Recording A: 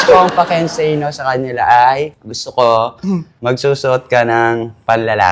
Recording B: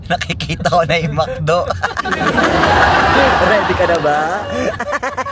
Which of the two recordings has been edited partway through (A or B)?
A